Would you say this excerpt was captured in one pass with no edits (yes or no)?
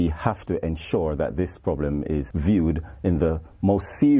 no